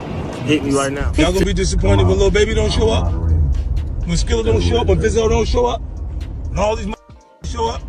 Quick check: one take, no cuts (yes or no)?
no